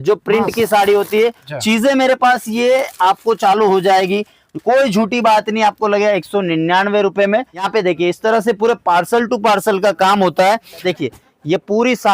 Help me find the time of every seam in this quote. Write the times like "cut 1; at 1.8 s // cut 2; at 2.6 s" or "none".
cut 1; at 1.5 s // cut 2; at 7.7 s // cut 3; at 10.9 s